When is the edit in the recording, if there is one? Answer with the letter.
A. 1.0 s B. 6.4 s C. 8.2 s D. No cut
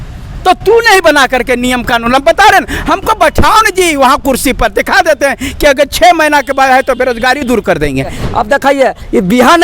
C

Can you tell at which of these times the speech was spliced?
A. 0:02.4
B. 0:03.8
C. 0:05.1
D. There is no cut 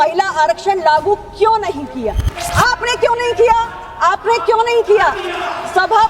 A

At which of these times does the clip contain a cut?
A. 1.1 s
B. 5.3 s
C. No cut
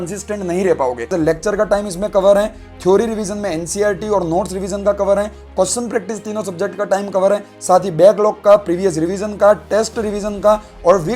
A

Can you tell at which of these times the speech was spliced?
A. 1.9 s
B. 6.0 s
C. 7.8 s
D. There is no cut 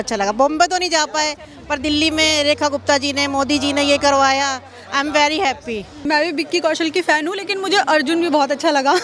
B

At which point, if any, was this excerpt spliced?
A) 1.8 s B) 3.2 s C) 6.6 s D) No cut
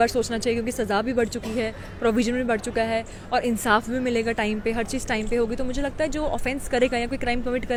D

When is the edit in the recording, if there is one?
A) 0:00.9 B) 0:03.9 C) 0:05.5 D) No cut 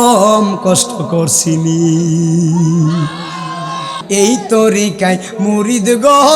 B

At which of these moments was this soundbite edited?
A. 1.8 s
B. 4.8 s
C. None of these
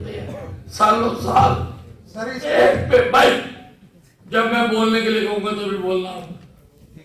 C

